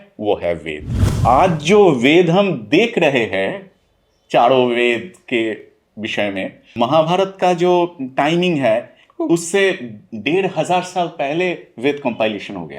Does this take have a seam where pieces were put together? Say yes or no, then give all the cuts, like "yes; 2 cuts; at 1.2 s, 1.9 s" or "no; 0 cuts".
yes; 2 cuts; at 1.1 s, 6.8 s